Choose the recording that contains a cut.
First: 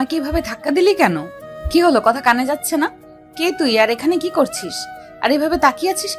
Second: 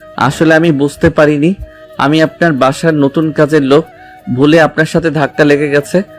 first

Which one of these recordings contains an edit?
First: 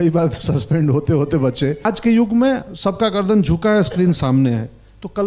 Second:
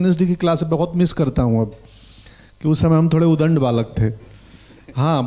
first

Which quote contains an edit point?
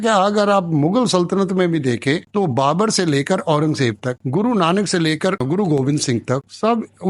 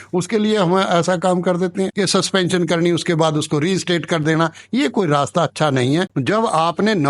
second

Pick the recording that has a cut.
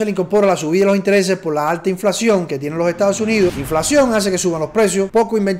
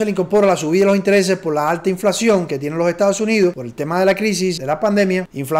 first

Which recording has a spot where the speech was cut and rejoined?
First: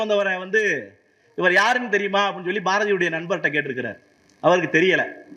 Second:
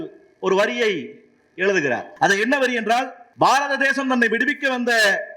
second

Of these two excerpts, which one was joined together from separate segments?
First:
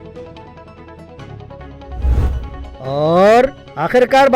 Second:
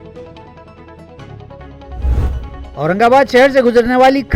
first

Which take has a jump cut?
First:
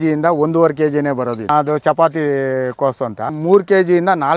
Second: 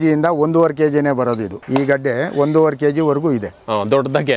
first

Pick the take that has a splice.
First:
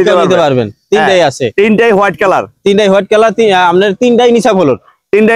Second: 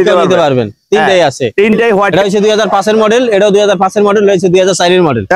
second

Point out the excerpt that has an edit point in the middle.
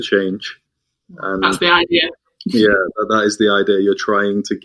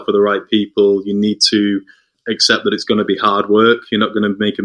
second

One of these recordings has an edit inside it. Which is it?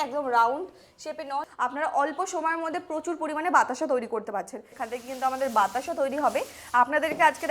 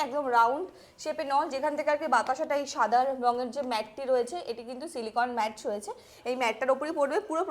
first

